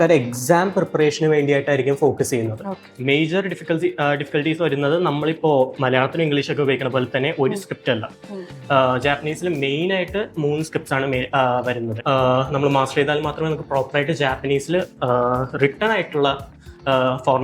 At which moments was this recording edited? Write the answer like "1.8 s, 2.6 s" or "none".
2.9 s, 11.9 s